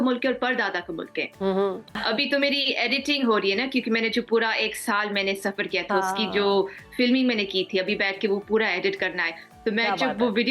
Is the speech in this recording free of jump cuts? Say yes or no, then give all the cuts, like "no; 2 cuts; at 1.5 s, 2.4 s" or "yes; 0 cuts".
no; 1 cut; at 1.9 s